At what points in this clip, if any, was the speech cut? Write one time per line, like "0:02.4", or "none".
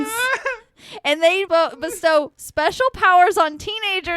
0:01.5